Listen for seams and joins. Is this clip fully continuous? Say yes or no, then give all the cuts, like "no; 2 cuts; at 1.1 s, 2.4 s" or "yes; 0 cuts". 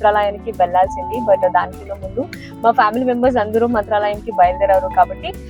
yes; 0 cuts